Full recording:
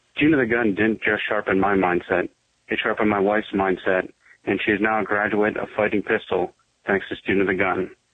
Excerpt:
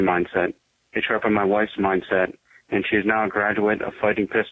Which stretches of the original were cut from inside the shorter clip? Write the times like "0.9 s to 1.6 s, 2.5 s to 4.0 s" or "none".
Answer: none